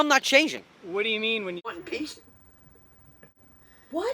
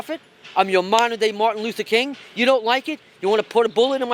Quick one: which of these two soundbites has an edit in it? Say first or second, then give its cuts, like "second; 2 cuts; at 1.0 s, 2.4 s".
first; 1 cut; at 1.7 s